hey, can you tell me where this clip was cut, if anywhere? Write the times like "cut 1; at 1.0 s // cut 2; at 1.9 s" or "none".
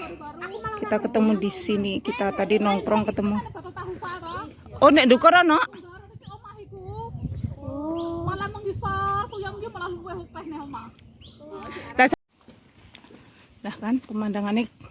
cut 1; at 12.1 s